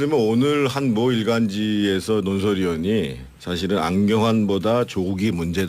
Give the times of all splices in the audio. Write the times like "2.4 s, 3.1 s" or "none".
2.6 s